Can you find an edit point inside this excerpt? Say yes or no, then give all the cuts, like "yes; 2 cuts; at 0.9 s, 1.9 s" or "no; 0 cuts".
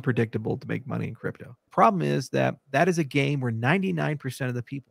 yes; 1 cut; at 1.6 s